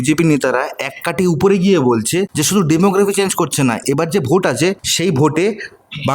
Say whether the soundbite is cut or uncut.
cut